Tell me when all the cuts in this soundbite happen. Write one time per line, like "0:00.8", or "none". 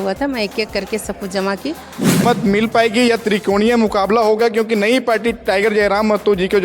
0:02.2